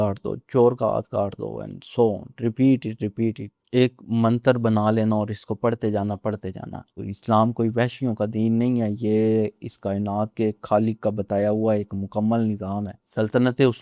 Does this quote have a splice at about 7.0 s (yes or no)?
yes